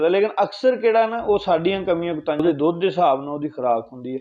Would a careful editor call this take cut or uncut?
cut